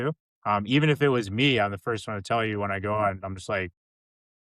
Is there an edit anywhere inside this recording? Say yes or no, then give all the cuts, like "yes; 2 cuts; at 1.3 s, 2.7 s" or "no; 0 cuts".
no; 0 cuts